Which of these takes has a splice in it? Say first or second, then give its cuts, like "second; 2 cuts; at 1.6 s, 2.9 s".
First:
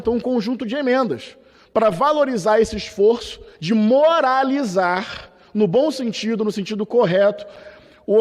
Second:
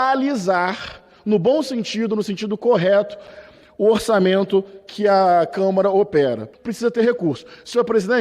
second; 1 cut; at 6.5 s